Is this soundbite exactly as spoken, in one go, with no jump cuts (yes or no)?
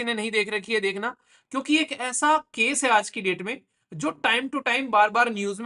yes